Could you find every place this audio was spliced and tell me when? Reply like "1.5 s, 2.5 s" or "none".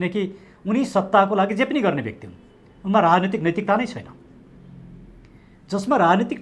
none